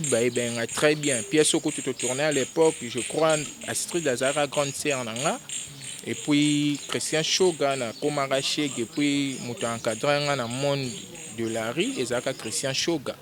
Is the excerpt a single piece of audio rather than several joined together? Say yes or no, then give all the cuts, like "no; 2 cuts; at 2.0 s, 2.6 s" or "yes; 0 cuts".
yes; 0 cuts